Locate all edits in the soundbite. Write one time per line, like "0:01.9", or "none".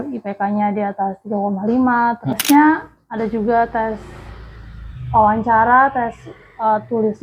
0:02.4